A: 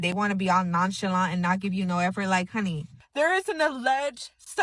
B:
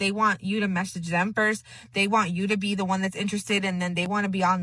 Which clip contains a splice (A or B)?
A